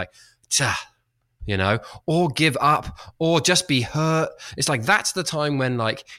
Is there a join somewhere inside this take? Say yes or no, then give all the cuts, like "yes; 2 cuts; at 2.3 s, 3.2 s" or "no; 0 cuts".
no; 0 cuts